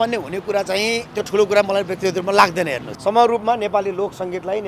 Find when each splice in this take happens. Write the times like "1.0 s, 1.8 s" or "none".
2.9 s